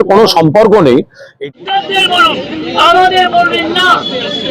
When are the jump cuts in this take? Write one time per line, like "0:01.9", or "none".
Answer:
0:01.3

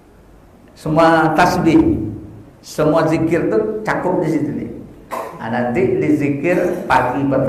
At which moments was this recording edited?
none

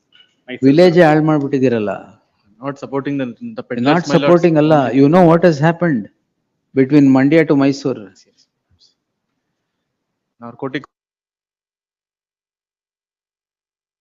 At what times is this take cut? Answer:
none

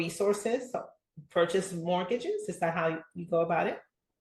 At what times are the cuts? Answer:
none

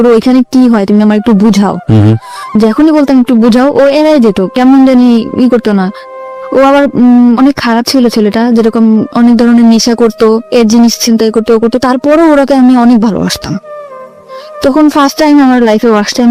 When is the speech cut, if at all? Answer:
none

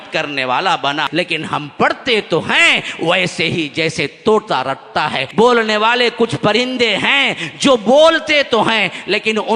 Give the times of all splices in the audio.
0:01.1
0:05.2

